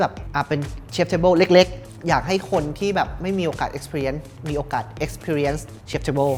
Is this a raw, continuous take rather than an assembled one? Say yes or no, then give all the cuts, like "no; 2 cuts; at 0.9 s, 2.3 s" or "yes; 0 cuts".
yes; 0 cuts